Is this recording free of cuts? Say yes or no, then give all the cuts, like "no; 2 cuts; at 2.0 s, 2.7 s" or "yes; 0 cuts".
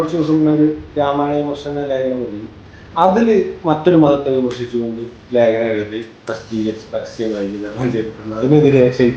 no; 1 cut; at 2.4 s